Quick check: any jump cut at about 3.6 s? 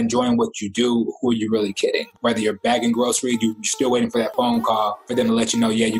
no; 2 cuts; at 2.1 s, 5.0 s

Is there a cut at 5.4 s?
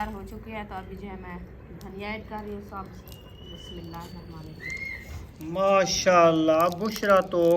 yes; 1 cut; at 5.4 s

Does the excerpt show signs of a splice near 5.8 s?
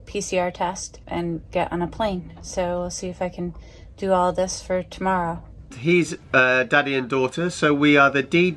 yes; 2 cuts; at 0.9 s, 5.8 s

